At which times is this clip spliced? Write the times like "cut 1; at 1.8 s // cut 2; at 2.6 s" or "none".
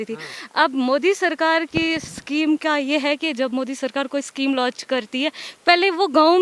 none